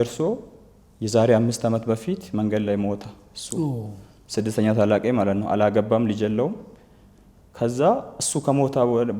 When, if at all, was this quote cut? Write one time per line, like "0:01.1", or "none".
none